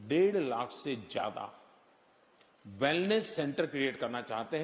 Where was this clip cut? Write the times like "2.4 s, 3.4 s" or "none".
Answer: none